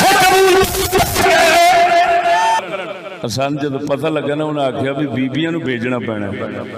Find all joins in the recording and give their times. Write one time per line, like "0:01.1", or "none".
0:02.6